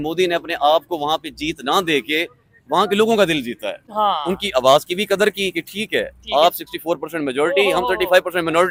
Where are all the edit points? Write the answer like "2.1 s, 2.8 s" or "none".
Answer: none